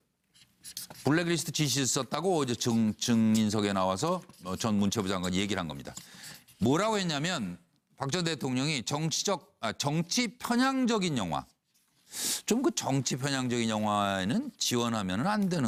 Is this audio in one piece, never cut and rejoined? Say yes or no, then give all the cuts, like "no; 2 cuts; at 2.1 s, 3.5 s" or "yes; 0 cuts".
yes; 0 cuts